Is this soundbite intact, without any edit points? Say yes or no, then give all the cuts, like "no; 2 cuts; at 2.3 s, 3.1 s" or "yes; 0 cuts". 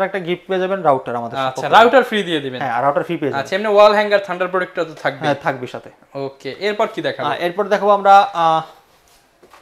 yes; 0 cuts